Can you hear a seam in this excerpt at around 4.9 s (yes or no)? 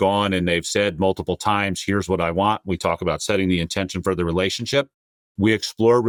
no